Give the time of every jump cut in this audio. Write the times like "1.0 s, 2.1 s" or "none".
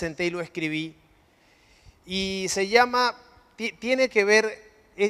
none